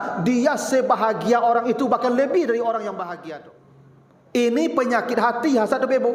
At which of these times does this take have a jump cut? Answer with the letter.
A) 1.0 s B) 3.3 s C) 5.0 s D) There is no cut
B